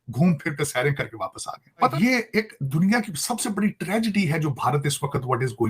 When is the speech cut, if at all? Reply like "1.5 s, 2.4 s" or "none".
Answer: 1.9 s

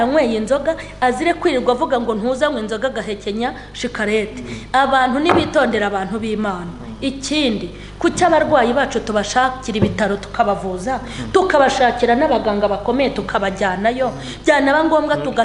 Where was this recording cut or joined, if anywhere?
none

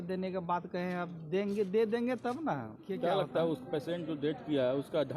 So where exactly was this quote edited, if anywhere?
2.8 s

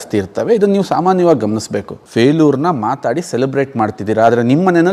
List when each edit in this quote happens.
2.0 s

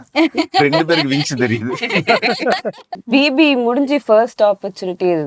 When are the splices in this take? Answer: 3.0 s

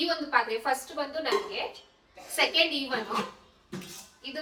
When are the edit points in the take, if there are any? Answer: none

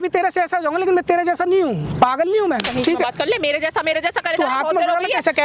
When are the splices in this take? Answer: none

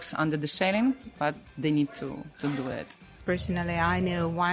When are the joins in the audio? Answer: 3.2 s

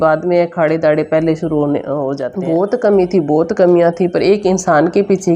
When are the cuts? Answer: 2.2 s

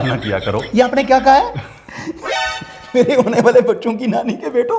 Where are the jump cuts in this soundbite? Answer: none

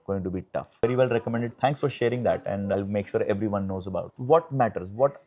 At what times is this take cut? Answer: 0.8 s, 4.1 s

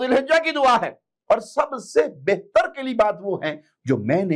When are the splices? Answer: none

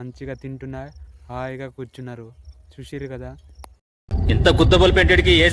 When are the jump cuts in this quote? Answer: none

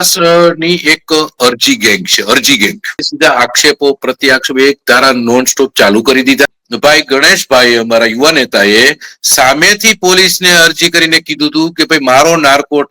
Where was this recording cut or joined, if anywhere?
3.1 s, 6.6 s

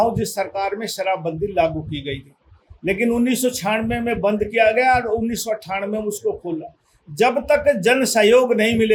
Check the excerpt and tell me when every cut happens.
none

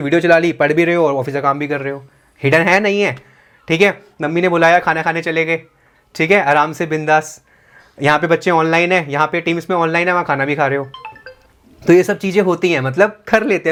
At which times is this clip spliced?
none

